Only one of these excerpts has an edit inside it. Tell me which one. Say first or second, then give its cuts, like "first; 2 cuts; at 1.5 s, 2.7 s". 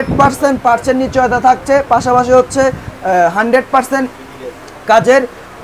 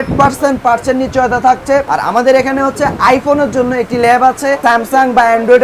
second; 2 cuts; at 1.8 s, 4.6 s